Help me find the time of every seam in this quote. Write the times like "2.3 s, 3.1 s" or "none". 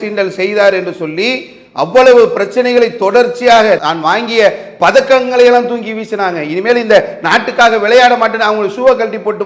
none